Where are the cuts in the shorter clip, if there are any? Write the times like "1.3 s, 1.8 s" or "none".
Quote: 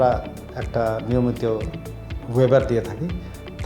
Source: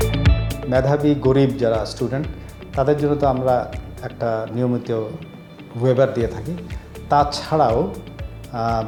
none

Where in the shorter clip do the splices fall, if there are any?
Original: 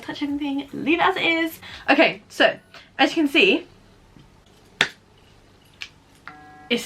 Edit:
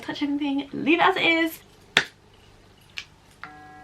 1.7 s

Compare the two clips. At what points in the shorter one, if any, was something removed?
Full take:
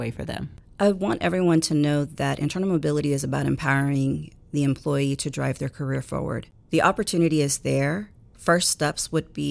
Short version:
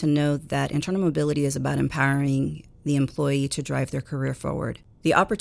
none

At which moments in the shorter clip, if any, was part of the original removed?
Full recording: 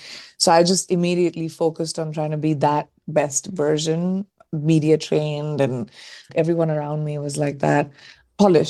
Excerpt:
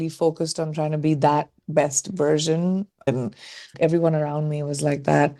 3.1 s

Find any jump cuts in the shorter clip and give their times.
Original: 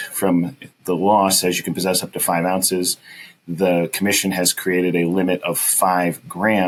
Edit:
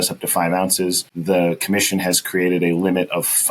1.1 s

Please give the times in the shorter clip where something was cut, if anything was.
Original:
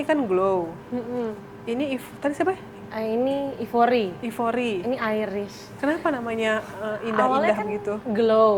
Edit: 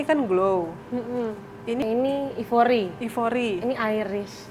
1.8 s

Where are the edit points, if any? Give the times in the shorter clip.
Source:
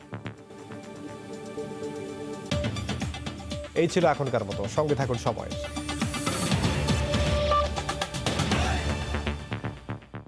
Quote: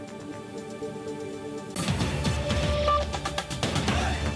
1.7 s

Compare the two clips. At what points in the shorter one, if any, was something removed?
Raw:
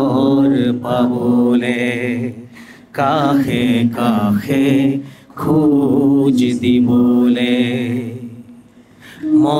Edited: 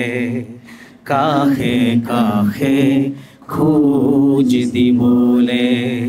none

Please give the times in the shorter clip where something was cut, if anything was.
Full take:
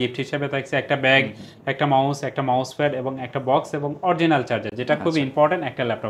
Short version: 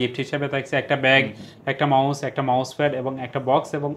none

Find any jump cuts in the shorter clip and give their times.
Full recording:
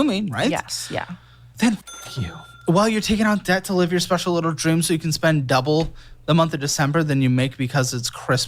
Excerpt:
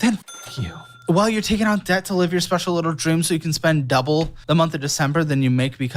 4.4 s

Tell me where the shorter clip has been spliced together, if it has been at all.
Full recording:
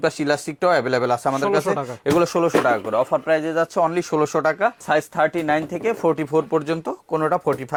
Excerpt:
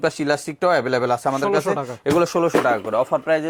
none

